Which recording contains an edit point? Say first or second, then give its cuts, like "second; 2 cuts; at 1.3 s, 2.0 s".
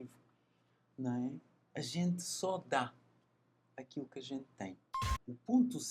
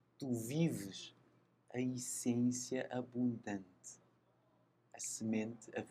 first; 1 cut; at 4.9 s